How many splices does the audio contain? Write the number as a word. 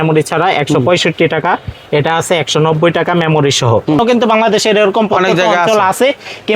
one